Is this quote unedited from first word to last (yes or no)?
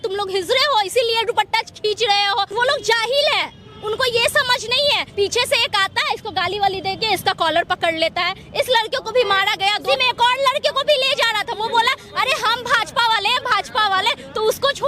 no